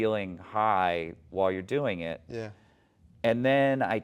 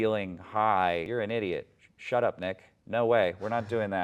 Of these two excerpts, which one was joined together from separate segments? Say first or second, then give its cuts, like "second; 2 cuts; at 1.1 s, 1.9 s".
second; 1 cut; at 1.1 s